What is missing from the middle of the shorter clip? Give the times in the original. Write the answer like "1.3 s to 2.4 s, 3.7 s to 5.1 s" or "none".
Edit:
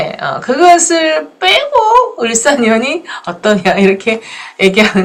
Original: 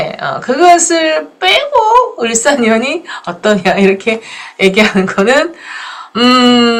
none

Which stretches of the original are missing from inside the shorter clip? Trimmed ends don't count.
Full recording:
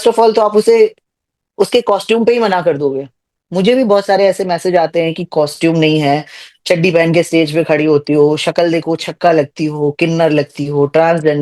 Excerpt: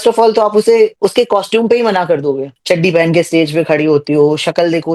0.9 s to 1.5 s, 3.1 s to 6.5 s

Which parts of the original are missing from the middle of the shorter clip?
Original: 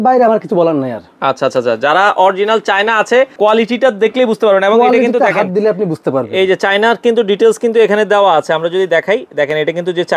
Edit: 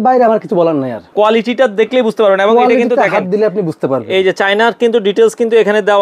1.1 s to 3.3 s

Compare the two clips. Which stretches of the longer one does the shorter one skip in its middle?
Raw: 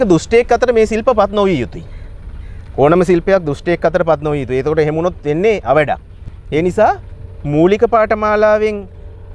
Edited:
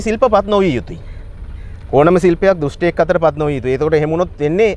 none

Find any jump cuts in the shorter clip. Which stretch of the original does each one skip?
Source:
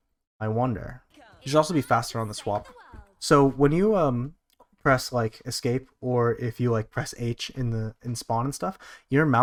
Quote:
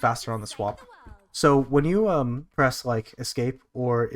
4.3 s to 4.7 s

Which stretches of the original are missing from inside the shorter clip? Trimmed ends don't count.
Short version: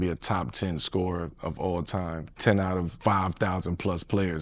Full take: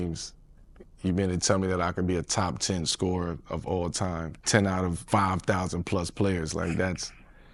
none

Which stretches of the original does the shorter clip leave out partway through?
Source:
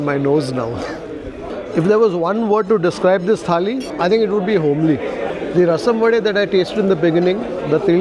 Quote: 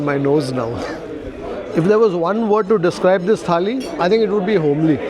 none

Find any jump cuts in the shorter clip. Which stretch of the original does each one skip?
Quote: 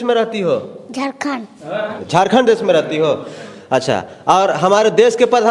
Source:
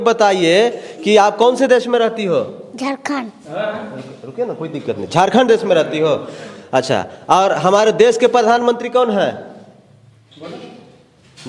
3.9 s to 5.0 s

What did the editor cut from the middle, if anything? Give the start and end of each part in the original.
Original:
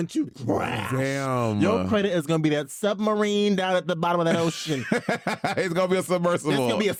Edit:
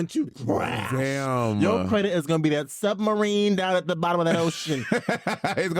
none

